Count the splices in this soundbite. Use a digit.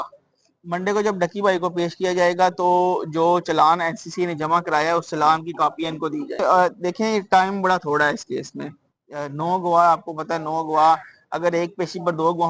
1